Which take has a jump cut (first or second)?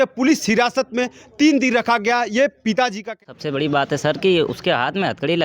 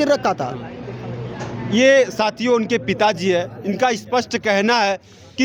first